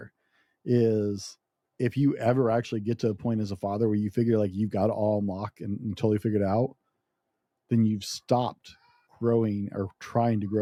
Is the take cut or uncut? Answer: uncut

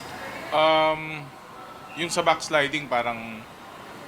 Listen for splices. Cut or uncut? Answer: cut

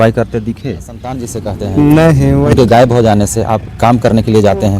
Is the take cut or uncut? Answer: cut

